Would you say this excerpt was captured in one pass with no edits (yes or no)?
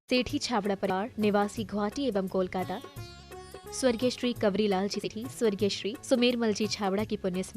no